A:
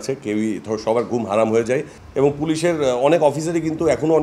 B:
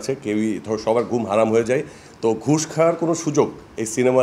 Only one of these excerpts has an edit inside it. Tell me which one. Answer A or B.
A